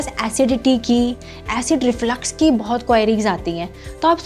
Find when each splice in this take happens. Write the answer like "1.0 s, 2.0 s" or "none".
none